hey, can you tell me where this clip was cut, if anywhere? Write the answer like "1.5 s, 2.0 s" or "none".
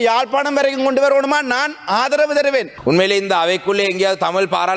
2.7 s